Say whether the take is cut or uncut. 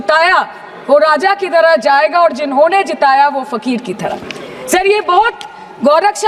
uncut